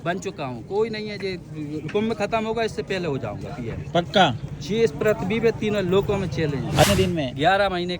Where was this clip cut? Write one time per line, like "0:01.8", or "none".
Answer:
0:06.8